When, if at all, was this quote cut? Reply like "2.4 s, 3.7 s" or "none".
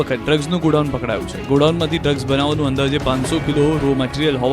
3.4 s